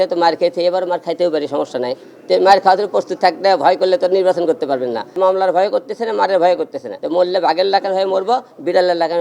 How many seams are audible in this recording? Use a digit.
2